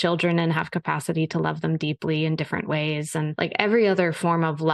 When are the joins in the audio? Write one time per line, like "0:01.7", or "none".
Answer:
0:03.3